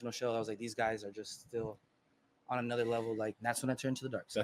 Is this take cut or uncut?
cut